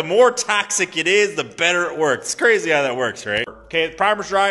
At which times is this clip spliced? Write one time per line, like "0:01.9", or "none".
0:03.5